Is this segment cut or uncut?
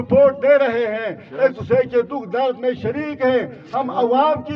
uncut